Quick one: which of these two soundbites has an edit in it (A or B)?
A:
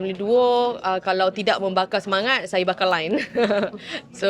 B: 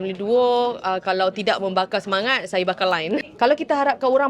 B